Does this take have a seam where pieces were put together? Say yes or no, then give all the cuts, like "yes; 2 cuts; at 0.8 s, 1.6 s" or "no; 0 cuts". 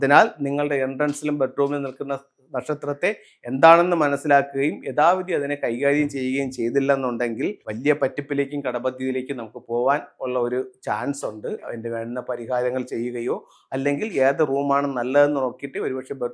yes; 2 cuts; at 7.7 s, 11.6 s